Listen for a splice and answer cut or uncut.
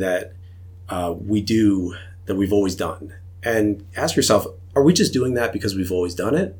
cut